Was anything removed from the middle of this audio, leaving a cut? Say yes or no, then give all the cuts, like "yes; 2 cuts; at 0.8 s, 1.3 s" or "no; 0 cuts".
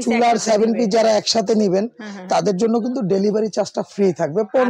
no; 0 cuts